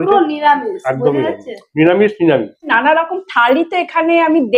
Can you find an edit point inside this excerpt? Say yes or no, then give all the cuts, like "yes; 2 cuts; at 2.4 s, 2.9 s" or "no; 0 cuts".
yes; 1 cut; at 2.7 s